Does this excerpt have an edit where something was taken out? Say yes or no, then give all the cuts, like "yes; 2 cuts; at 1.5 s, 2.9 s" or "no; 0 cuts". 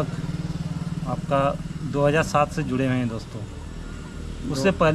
no; 0 cuts